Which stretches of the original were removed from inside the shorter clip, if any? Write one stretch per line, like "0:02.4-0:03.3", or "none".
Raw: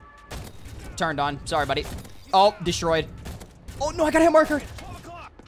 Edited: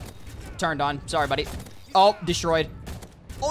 none